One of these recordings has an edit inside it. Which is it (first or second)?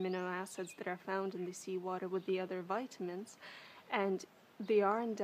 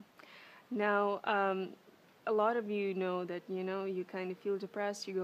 first